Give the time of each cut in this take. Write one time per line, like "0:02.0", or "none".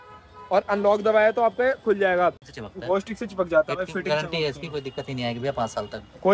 0:02.5